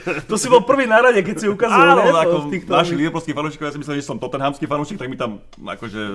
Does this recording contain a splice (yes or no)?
no